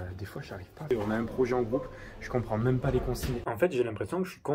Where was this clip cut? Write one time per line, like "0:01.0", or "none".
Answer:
0:00.9
0:03.4